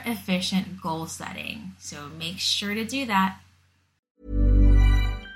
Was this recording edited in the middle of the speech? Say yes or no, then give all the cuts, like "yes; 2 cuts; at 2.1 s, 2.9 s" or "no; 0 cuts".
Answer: yes; 1 cut; at 3.9 s